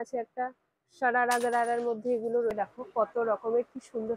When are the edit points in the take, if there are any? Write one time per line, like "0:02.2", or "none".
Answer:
0:02.5